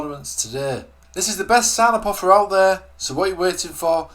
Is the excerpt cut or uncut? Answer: cut